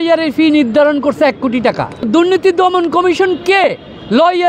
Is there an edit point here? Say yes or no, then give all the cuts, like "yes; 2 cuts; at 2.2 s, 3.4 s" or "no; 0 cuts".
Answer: yes; 1 cut; at 2.1 s